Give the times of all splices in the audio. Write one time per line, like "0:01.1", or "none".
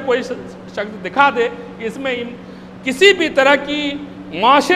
none